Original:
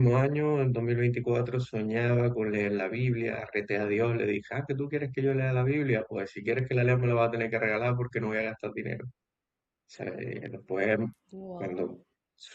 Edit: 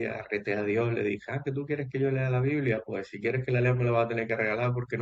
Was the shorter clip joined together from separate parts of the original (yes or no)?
no